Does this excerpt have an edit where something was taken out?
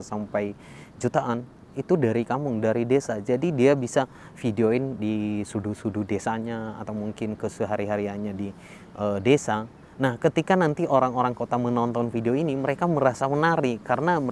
no; 0 cuts

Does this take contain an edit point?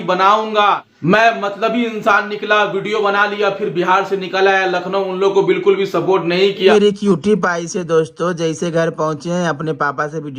yes; 2 cuts; at 0.9 s, 6.7 s

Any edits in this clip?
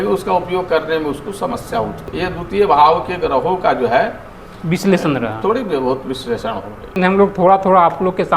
yes; 2 cuts; at 2.1 s, 6.9 s

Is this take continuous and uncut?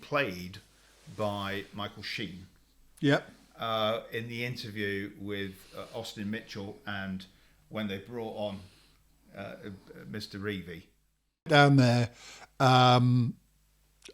no; 1 cut; at 11.5 s

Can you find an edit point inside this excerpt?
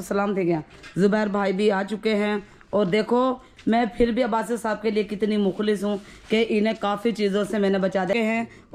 no; 0 cuts

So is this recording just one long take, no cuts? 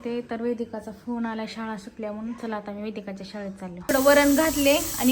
no; 1 cut; at 3.7 s

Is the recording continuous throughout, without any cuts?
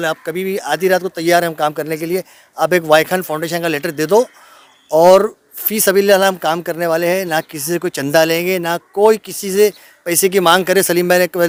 yes; 0 cuts

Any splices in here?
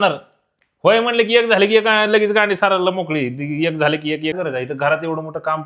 yes; 1 cut; at 4.3 s

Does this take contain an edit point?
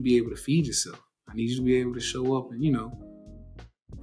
no; 0 cuts

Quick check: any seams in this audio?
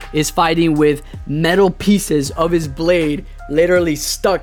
no; 0 cuts

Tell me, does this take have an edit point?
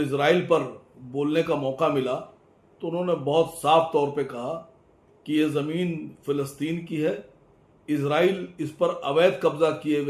no; 0 cuts

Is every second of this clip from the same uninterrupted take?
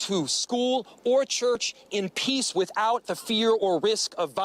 yes; 0 cuts

